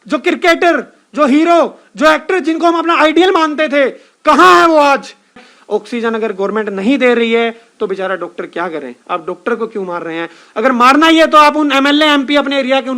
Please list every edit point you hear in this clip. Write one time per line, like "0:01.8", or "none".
0:05.4